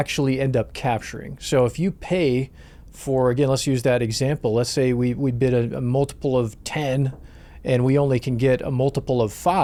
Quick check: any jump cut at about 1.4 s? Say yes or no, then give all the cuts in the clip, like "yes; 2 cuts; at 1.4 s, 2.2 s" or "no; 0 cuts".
no; 0 cuts